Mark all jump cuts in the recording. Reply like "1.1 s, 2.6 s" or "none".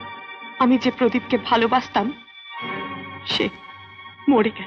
none